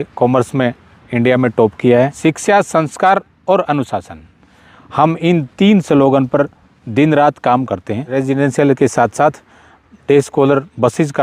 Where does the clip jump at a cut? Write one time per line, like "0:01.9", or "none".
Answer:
0:02.1
0:08.0